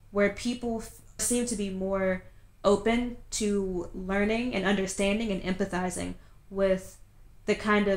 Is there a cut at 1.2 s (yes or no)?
yes